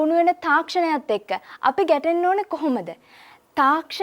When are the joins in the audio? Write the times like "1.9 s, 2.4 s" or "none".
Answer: none